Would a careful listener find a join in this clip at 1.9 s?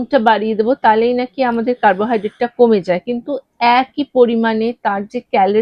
no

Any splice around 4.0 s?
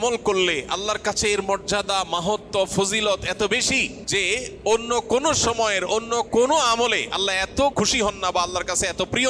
yes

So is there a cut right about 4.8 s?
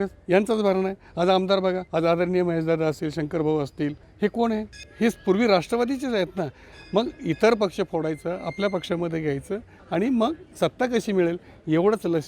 yes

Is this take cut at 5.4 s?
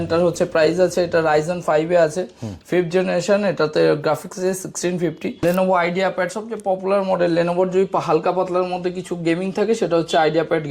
yes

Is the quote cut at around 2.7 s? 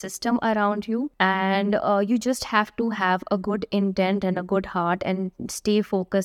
no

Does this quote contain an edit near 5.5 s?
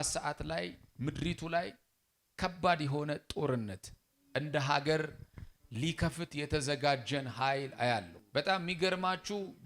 no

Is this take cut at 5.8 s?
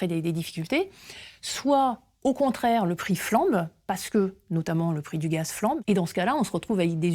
yes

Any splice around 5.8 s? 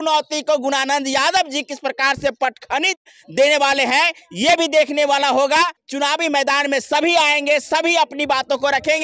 yes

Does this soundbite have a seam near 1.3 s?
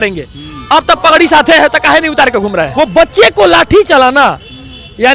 no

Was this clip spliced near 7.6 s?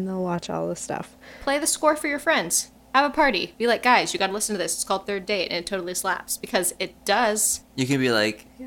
yes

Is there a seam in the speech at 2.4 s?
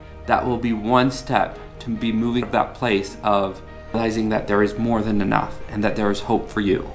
yes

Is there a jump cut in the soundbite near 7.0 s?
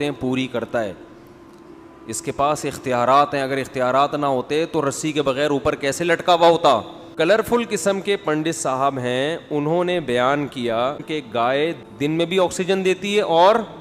yes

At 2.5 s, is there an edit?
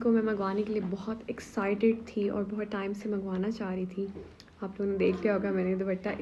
no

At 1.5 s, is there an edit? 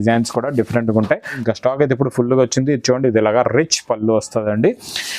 yes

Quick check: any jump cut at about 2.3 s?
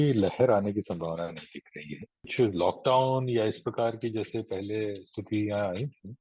yes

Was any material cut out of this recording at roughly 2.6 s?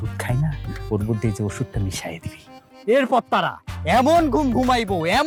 no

